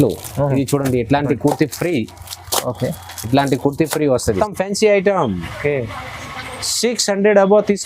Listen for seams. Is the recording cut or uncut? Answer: cut